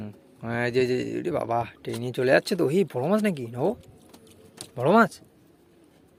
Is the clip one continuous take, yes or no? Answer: yes